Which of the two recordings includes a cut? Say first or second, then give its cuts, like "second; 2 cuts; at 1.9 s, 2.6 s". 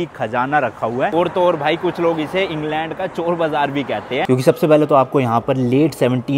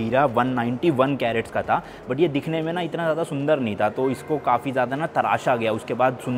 first; 2 cuts; at 1.1 s, 4.2 s